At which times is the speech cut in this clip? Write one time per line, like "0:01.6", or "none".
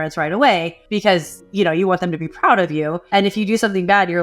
0:01.0
0:03.0